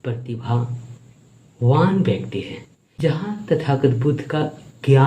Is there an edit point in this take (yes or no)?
yes